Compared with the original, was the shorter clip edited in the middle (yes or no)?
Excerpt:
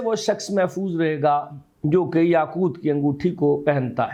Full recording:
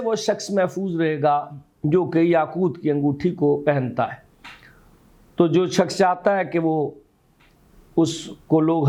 no